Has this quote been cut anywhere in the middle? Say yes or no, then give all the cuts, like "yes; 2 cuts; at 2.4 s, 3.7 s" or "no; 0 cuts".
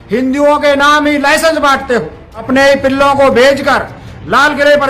yes; 1 cut; at 2.3 s